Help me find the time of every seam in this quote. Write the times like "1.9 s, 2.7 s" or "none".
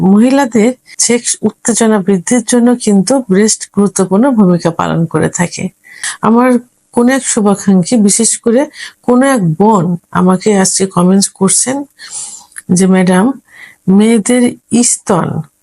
0.9 s, 6.0 s